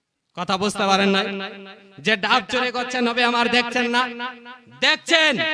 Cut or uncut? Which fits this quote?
uncut